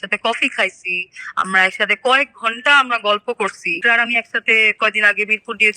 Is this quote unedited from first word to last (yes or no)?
no